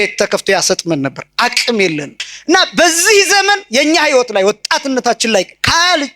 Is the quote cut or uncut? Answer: cut